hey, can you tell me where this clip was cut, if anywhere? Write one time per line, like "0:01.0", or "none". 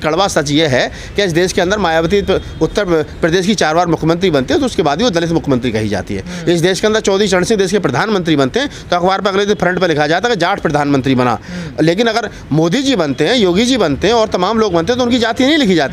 none

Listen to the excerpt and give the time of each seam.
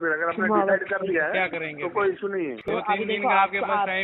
0:02.7

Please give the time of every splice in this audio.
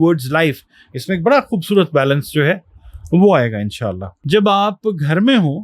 0:04.1

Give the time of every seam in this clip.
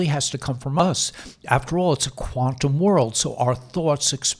none

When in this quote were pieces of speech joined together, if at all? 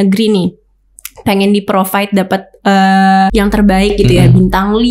0:03.3

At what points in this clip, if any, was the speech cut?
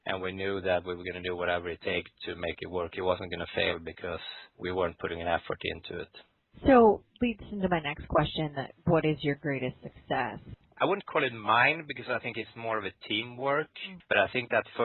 none

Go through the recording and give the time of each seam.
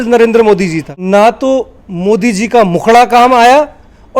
0:00.9

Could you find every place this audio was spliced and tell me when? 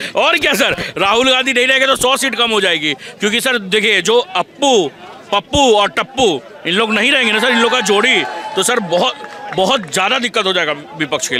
none

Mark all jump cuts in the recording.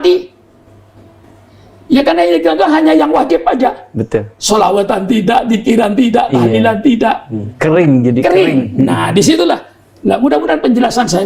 none

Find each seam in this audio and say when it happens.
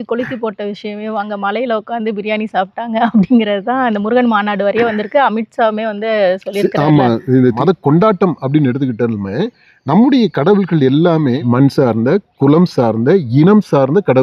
0:07.6
0:11.4

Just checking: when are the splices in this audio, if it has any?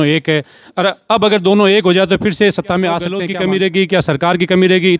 0:03.2

